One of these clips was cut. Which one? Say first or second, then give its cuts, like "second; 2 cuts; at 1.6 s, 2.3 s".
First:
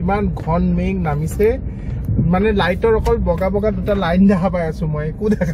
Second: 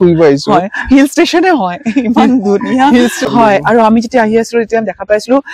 second; 1 cut; at 3.3 s